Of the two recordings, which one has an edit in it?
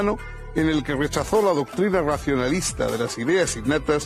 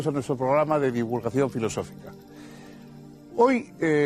second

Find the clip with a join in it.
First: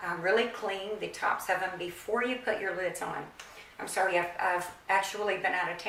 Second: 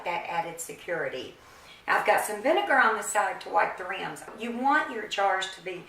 second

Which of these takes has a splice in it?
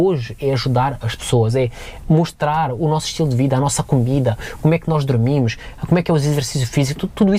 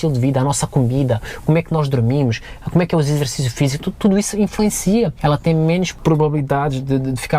second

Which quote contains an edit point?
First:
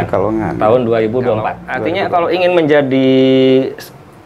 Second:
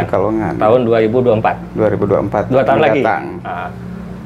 first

